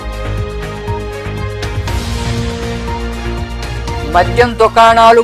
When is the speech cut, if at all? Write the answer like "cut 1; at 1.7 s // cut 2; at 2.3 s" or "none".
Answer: cut 1; at 1.7 s